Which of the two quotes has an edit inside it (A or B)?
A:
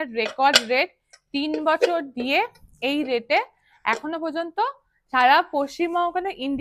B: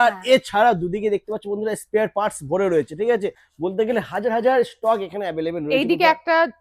B